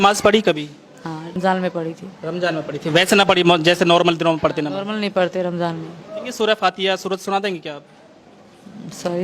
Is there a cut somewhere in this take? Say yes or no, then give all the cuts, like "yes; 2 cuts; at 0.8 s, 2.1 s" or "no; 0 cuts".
yes; 2 cuts; at 1.4 s, 6.3 s